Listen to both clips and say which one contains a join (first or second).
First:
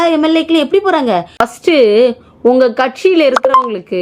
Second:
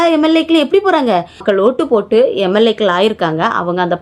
first